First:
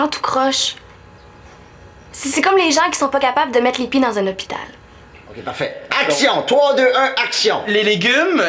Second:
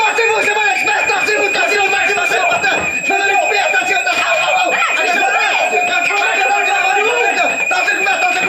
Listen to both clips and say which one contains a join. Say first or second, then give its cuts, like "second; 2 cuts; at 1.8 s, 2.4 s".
first; 1 cut; at 5.5 s